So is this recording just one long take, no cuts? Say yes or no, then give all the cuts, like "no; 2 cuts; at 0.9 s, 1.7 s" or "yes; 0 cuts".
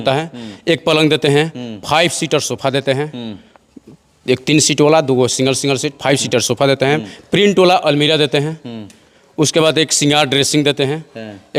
yes; 0 cuts